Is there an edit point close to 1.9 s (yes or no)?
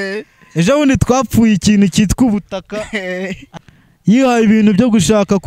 no